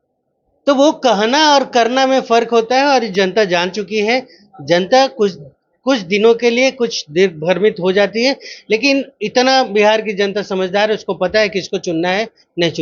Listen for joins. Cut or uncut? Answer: uncut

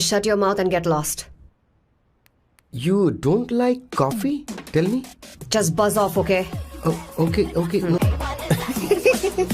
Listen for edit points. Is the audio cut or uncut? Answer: cut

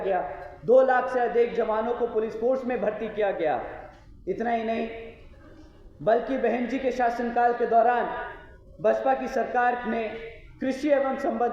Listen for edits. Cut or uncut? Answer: uncut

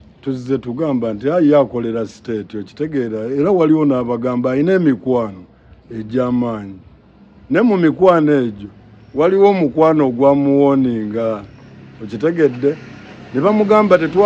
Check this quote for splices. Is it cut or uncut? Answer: uncut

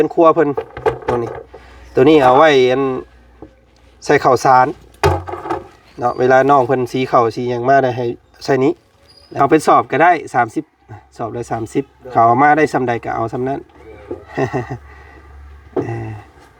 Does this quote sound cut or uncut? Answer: cut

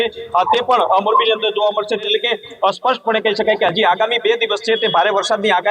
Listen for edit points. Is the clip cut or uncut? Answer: cut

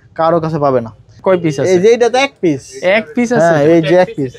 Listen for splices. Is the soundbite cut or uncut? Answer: cut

